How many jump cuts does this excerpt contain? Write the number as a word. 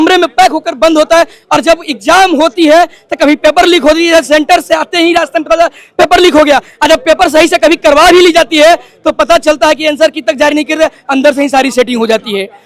zero